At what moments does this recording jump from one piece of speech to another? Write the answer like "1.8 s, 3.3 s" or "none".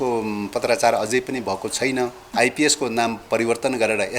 2.2 s